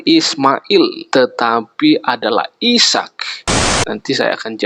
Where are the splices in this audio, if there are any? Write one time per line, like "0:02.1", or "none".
0:03.7

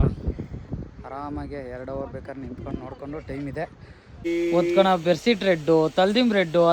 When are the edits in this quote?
0:04.2

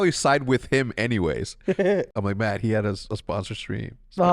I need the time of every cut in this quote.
0:02.1

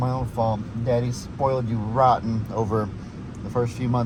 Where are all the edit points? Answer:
none

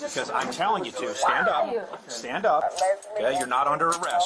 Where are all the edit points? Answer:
0:02.6

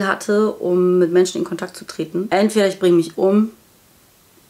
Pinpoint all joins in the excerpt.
0:02.3

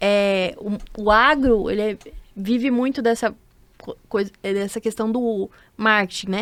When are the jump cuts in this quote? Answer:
none

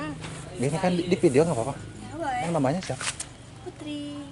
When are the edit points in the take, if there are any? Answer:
0:02.4

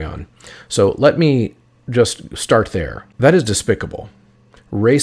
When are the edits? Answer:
0:03.0

